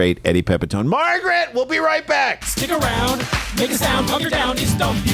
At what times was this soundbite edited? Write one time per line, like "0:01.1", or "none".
0:02.5